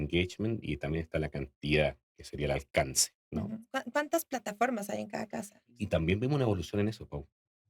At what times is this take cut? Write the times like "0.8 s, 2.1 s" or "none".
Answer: 3.7 s, 5.8 s